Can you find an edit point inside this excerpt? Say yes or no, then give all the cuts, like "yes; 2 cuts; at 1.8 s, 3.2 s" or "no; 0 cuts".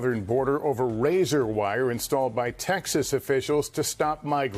no; 0 cuts